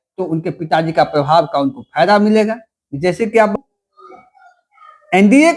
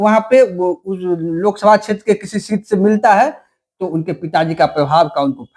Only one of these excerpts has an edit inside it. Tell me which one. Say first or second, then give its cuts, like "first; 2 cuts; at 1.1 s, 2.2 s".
first; 1 cut; at 3.5 s